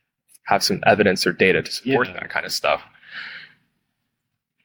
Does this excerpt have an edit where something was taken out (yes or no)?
no